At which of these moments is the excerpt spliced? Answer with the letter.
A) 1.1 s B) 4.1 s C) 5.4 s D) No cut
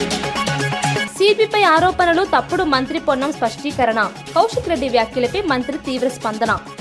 A